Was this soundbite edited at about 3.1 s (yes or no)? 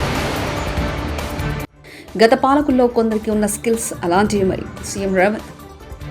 no